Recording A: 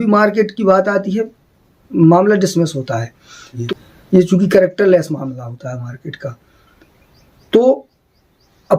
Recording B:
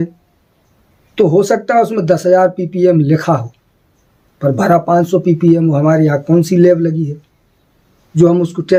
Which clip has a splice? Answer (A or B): A